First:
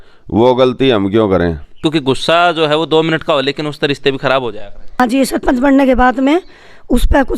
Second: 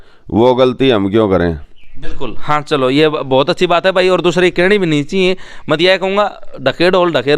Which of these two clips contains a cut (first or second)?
first